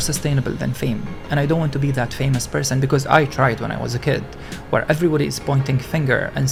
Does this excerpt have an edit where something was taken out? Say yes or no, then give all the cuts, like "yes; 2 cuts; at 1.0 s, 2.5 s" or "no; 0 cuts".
no; 0 cuts